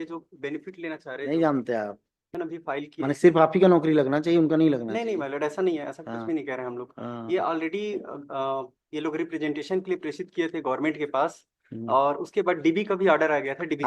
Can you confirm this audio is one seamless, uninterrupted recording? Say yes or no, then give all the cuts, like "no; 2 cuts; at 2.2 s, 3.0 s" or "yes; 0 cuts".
no; 1 cut; at 2.2 s